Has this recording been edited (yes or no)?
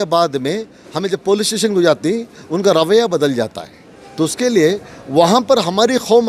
no